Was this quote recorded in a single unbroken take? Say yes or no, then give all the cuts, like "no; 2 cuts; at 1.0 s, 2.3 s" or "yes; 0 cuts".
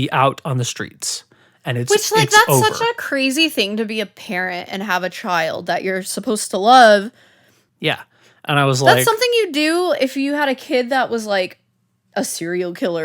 no; 1 cut; at 7.6 s